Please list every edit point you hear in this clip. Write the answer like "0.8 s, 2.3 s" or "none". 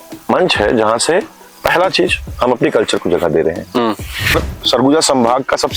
4.3 s